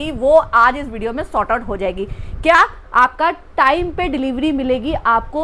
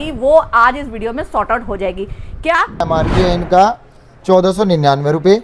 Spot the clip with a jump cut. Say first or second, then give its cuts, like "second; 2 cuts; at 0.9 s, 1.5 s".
second; 1 cut; at 2.9 s